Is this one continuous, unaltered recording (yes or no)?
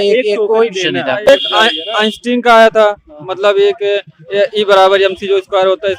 no